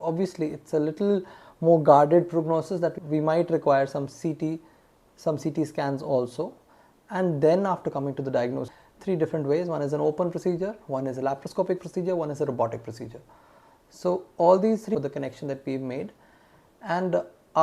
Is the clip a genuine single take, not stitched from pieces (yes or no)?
no